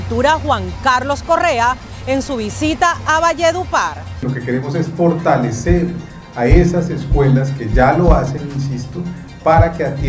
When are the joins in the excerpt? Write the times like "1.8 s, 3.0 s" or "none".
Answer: 4.2 s